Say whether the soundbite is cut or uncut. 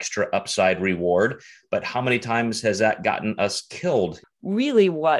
cut